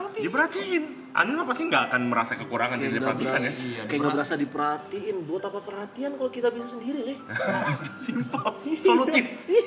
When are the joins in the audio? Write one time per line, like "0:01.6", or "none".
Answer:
none